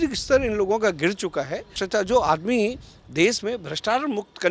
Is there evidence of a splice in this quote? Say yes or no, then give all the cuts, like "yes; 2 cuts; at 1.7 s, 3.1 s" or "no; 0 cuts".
yes; 1 cut; at 1.7 s